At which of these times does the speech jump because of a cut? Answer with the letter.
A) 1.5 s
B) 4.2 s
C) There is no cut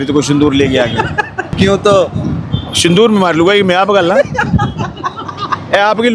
A